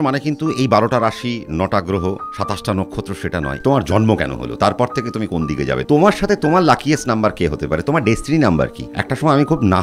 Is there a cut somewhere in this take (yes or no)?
yes